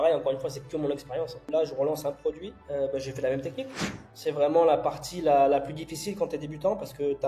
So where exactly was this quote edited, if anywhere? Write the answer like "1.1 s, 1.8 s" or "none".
1.4 s, 2.5 s, 4.1 s